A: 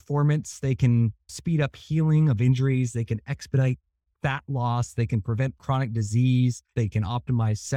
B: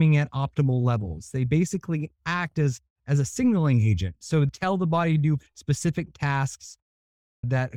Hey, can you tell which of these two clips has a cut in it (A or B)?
A